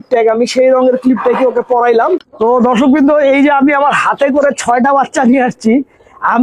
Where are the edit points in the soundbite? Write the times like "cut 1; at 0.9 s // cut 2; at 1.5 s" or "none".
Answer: cut 1; at 2.2 s